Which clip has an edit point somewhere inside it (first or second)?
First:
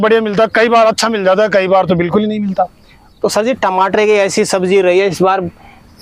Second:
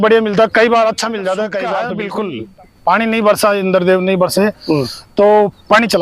second